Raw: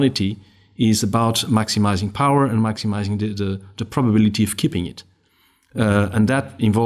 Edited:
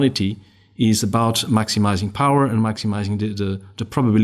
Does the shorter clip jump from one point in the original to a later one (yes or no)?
no